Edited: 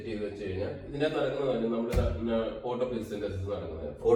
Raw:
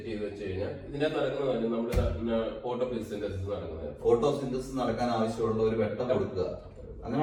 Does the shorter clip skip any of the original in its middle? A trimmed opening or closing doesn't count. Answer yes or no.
no